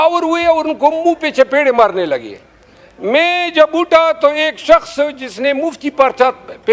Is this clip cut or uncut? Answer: uncut